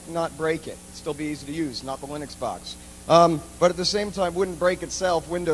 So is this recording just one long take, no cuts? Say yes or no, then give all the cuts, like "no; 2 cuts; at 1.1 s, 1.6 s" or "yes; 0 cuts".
no; 1 cut; at 2.5 s